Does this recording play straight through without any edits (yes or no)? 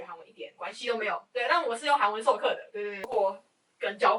no